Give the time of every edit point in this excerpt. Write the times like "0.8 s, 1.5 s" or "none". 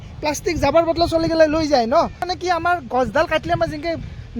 2.3 s